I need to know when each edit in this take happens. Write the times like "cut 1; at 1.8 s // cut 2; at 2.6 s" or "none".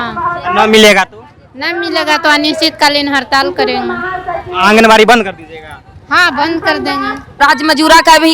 cut 1; at 7.4 s